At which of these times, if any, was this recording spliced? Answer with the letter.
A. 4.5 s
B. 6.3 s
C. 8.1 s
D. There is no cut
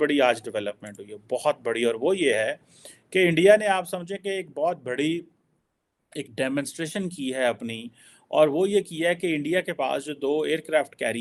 D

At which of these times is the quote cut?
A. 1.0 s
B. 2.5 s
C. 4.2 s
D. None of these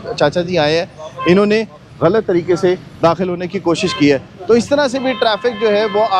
D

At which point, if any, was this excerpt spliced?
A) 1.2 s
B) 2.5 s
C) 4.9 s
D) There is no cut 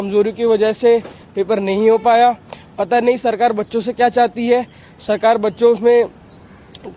D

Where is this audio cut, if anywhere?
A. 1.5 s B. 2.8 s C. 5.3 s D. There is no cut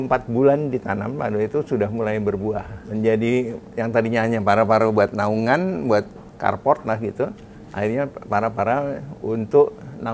B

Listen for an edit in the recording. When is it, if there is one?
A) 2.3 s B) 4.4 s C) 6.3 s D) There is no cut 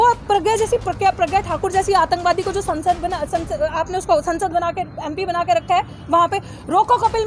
D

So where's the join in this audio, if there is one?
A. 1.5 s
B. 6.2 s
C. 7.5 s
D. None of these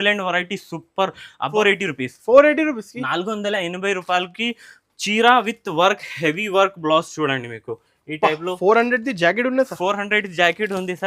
A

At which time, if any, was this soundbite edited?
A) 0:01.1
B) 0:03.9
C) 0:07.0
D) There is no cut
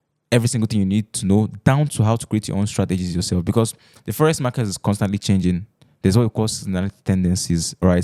D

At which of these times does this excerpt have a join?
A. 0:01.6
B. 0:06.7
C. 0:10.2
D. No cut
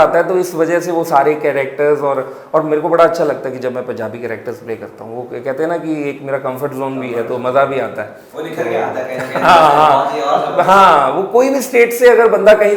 D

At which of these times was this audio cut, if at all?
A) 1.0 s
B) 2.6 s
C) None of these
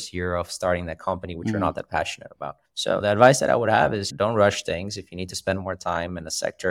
C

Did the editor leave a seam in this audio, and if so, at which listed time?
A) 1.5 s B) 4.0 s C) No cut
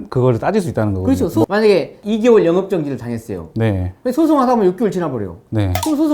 A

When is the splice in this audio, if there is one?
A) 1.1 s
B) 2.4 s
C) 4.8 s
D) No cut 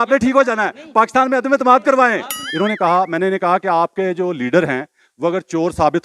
B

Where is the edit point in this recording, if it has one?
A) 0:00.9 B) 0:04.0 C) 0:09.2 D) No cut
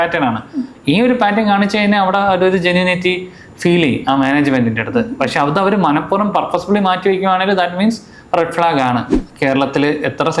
C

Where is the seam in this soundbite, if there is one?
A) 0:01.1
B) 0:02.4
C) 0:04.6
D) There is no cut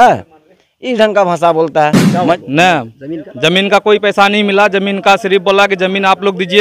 B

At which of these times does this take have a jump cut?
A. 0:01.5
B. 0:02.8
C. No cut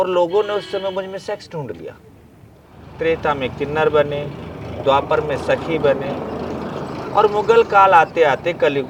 B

